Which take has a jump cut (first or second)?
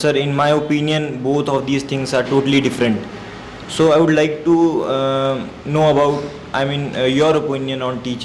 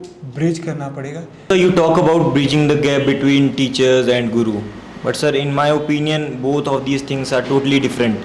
second